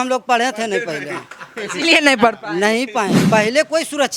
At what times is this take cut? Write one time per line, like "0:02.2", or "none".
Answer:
0:03.2